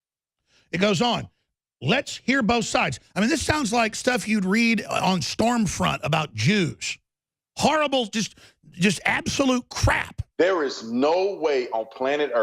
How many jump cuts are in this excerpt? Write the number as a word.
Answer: one